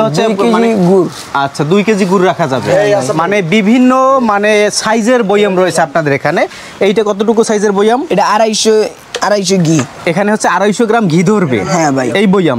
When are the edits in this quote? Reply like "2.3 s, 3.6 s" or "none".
none